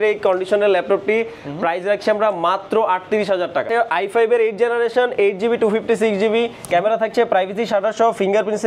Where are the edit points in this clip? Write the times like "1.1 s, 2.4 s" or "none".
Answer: 3.7 s